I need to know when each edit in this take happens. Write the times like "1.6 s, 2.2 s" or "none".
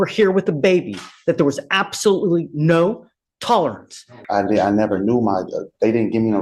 4.2 s